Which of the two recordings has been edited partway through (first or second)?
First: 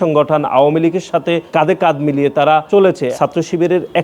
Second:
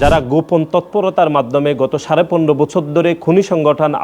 first